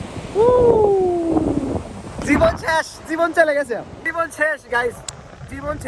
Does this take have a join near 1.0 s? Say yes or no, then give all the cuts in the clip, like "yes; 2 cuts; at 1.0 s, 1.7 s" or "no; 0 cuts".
no; 2 cuts; at 2.2 s, 4.0 s